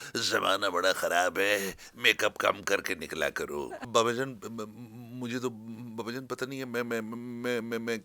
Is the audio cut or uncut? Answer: cut